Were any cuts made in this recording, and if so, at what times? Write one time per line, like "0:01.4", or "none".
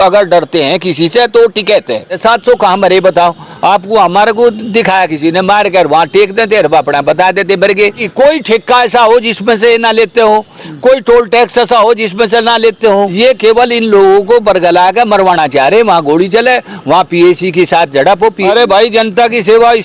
0:02.1
0:08.0
0:13.1
0:18.5